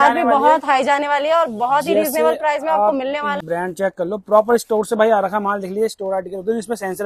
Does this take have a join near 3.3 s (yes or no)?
yes